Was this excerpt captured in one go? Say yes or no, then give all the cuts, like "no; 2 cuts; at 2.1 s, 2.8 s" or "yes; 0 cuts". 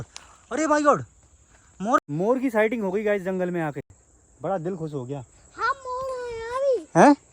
no; 1 cut; at 2.1 s